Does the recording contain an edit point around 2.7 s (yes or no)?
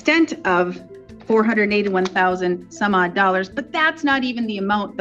no